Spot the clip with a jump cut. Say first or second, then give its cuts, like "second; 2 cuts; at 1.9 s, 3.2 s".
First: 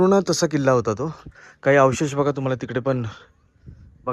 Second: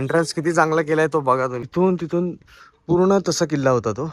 second; 1 cut; at 1.7 s